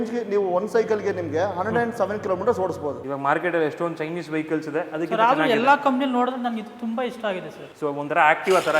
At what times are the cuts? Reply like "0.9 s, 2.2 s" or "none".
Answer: 3.0 s, 7.6 s